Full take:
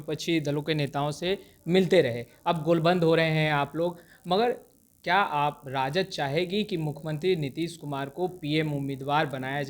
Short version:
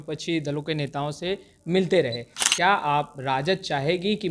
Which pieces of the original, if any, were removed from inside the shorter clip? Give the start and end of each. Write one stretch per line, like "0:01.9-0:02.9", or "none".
0:02.3-0:04.7

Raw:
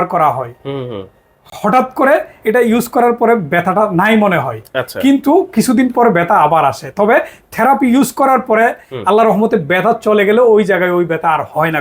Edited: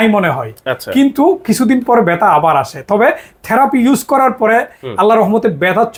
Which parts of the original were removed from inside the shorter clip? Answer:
none

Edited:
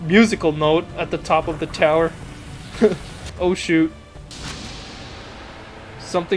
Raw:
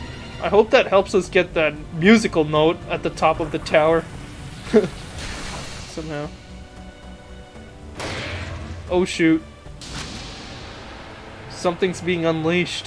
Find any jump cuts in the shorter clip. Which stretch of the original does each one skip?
0:05.1-0:08.7

